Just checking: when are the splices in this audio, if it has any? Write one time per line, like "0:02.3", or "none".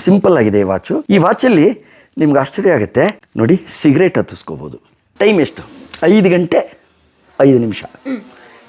0:00.9
0:03.2
0:05.0